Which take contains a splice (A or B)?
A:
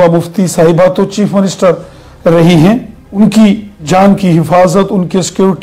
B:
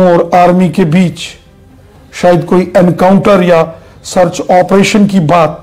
A